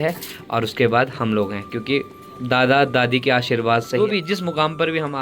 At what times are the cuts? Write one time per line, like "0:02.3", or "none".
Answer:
0:04.1